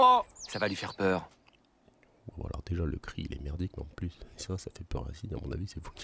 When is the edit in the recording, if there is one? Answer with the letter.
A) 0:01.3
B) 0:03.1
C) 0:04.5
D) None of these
D